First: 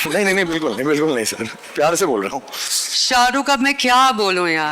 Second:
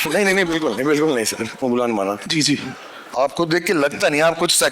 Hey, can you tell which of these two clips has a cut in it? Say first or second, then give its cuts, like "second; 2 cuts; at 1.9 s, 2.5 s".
second; 1 cut; at 1.6 s